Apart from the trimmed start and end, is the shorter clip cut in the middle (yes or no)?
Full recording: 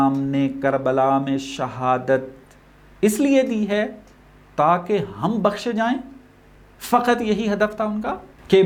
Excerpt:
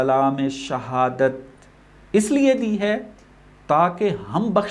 no